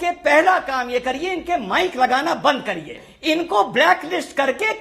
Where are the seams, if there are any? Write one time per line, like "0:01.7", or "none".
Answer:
0:03.1